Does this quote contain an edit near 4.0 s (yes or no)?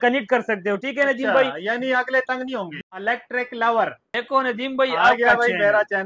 yes